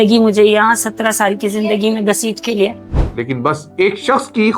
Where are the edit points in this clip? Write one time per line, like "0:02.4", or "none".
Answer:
0:02.9